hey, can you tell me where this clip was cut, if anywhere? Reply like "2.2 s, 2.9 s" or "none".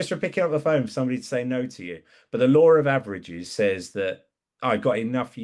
none